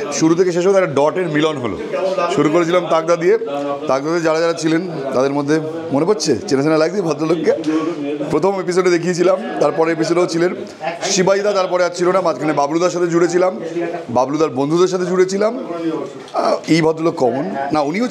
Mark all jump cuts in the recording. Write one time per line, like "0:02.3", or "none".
none

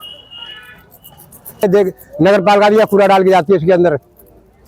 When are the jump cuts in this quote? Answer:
0:01.6

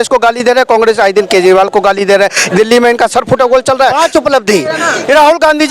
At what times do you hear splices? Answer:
0:04.0

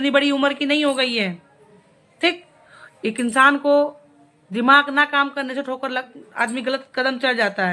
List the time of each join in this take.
none

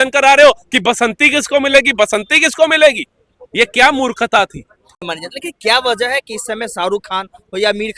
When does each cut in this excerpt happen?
0:05.0

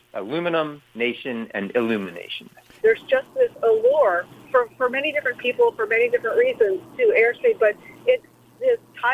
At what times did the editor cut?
0:02.8
0:04.3

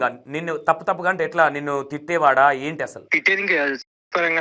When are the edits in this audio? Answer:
0:03.1

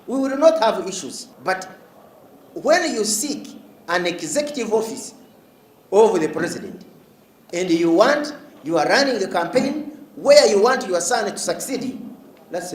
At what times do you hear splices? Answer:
0:01.3

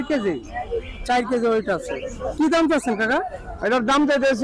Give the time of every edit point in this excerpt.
none

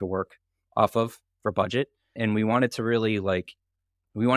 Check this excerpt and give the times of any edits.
0:02.2

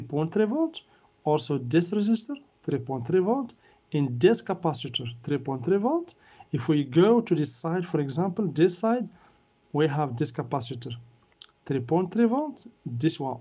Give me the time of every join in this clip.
none

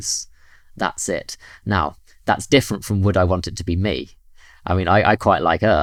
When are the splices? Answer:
none

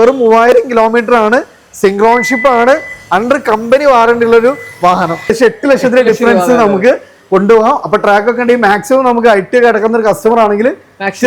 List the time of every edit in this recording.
0:05.2

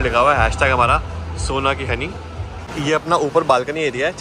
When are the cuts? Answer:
0:02.6

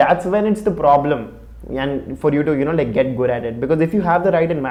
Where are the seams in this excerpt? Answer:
none

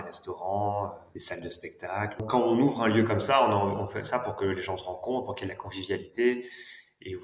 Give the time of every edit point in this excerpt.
0:01.1
0:02.2

